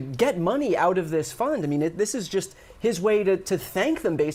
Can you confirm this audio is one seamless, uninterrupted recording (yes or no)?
yes